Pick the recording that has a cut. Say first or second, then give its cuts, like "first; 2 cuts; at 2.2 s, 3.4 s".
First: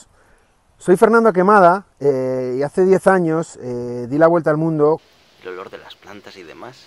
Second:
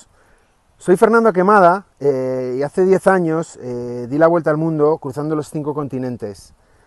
first; 1 cut; at 5.0 s